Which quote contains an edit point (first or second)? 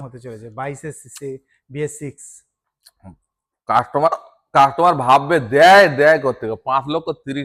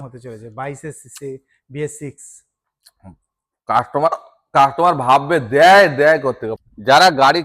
second